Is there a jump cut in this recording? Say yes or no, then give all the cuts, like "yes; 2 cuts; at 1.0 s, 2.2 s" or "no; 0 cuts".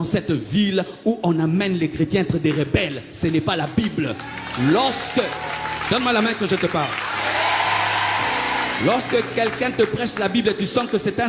no; 0 cuts